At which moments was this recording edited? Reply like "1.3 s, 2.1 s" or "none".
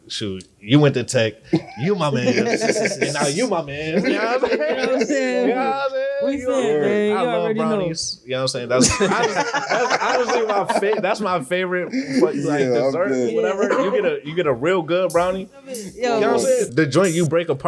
15.9 s, 16.7 s